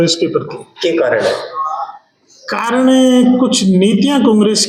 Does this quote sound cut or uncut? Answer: uncut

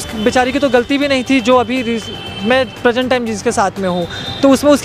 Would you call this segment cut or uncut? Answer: uncut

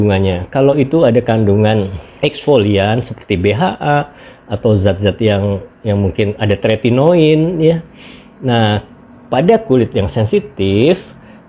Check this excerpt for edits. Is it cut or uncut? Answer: cut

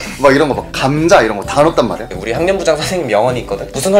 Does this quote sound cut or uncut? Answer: cut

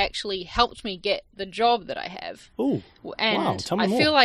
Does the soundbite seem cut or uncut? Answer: uncut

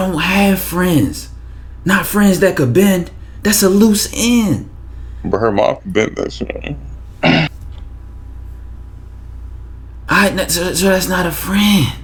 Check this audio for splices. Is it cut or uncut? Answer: uncut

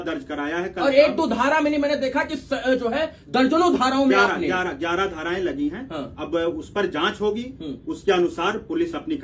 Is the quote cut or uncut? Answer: uncut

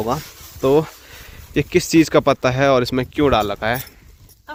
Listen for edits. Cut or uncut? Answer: uncut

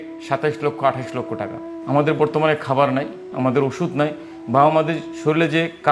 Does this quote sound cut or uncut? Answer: cut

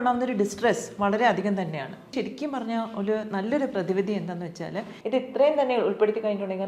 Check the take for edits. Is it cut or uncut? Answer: cut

